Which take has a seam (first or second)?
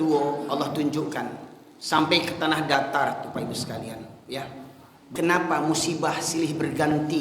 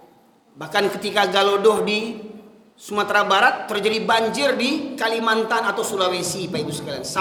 first